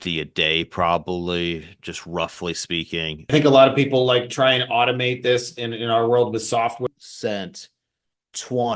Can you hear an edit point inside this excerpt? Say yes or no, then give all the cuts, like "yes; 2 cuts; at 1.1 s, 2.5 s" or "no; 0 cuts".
yes; 2 cuts; at 3.3 s, 6.8 s